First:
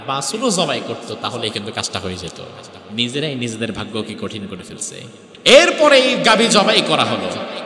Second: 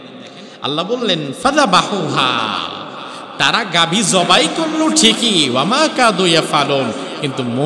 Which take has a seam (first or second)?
first